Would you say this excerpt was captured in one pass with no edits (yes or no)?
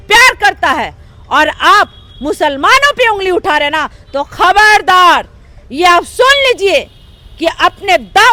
yes